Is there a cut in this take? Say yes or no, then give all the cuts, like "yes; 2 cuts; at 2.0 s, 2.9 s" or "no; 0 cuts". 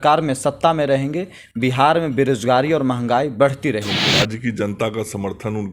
yes; 1 cut; at 4.0 s